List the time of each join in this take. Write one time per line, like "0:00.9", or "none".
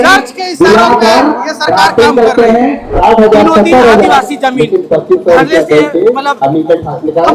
0:02.9